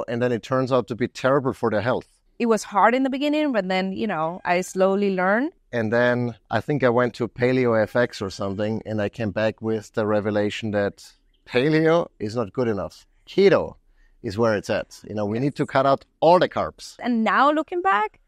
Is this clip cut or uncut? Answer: cut